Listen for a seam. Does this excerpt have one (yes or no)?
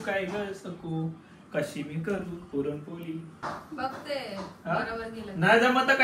yes